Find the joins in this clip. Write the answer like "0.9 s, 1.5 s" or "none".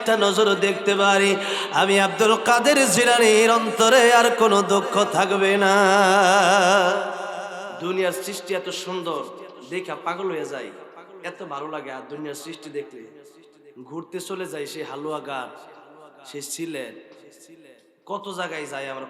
7.7 s